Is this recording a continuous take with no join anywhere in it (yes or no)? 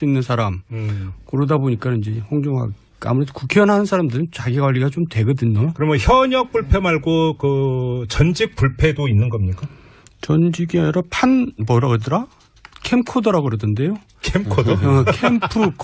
no